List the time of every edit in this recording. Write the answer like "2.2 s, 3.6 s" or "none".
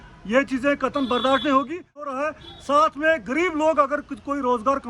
2.1 s